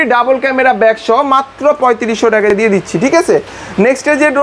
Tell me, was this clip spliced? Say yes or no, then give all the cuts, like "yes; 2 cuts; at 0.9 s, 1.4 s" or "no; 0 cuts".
no; 0 cuts